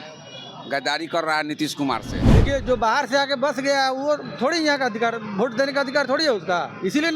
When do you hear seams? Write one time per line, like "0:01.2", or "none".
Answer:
0:02.4

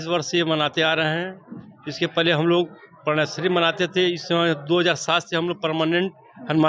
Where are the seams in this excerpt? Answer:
none

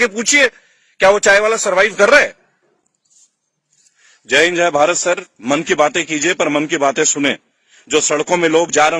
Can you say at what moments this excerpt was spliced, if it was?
none

